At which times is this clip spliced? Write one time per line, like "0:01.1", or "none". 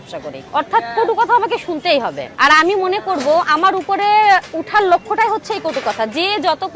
none